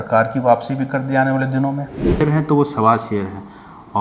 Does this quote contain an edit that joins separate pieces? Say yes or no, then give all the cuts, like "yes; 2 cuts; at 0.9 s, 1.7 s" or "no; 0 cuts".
yes; 1 cut; at 2.2 s